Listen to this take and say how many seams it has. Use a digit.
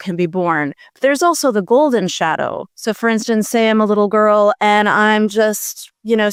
0